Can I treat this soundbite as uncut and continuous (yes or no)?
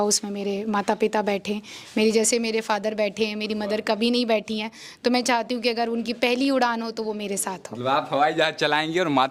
yes